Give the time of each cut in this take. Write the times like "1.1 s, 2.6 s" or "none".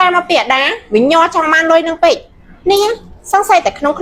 none